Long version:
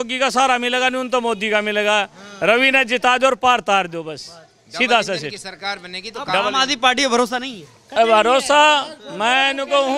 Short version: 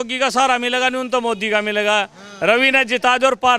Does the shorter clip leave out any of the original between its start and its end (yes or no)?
no